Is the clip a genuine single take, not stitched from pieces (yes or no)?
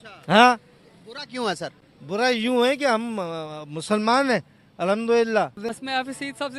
no